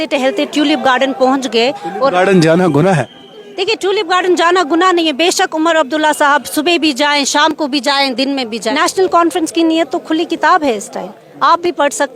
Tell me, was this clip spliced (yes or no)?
yes